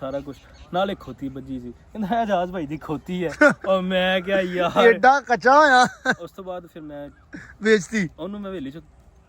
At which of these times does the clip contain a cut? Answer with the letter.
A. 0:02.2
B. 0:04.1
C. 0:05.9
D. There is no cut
D